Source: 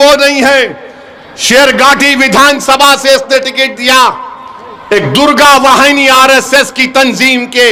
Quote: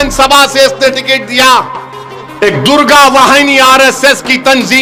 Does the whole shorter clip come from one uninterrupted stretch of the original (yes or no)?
yes